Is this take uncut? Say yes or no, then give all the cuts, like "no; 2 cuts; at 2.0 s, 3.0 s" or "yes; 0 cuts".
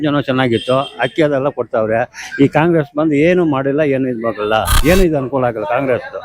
no; 1 cut; at 4.8 s